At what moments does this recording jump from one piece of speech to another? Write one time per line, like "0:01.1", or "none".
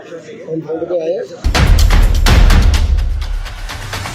0:01.4